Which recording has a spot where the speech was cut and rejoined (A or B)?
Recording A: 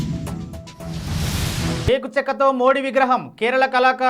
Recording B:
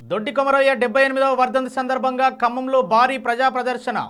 A